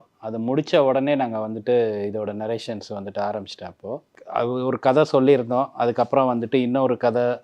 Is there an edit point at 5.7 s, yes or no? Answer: no